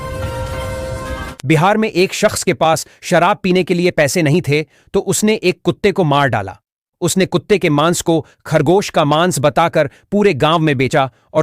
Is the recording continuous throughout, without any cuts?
no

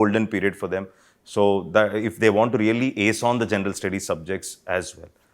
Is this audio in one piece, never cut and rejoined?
yes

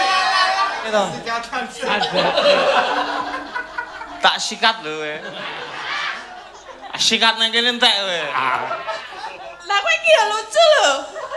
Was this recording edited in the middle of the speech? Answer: yes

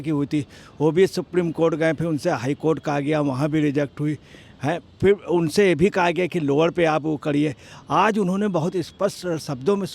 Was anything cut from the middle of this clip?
no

